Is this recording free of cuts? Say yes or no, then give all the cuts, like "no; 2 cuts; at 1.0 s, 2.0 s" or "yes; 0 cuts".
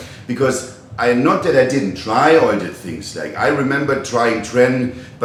yes; 0 cuts